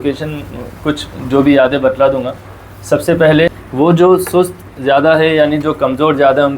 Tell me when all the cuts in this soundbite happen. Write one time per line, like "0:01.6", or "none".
0:03.5